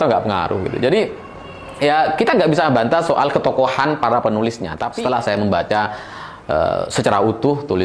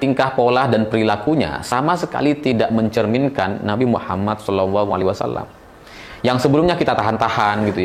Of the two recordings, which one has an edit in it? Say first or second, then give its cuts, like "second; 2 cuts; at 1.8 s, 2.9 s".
first; 1 cut; at 5.4 s